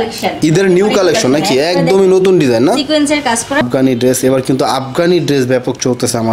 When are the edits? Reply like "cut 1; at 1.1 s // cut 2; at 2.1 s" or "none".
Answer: cut 1; at 3.6 s

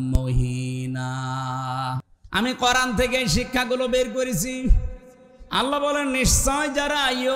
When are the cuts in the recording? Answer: cut 1; at 2.0 s

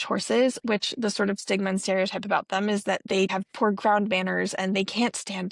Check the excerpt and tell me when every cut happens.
cut 1; at 3.2 s

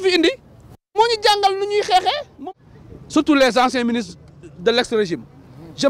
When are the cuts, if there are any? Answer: cut 1; at 2.4 s

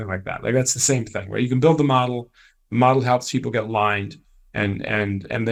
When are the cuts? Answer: none

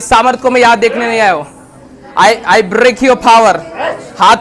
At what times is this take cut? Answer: none

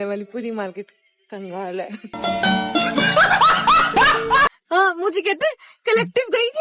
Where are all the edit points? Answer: cut 1; at 4.6 s

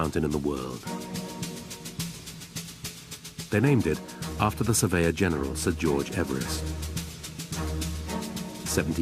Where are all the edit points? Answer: cut 1; at 6.1 s

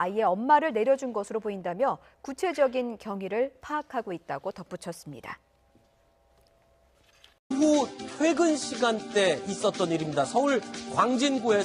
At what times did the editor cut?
cut 1; at 3.8 s

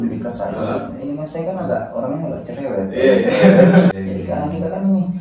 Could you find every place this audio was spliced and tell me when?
cut 1; at 3.9 s

